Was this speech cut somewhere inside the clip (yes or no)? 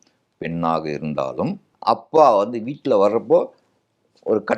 yes